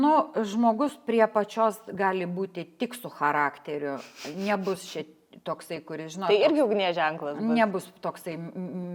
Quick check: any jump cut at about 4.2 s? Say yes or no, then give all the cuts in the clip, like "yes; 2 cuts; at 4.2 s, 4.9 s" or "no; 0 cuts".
no; 0 cuts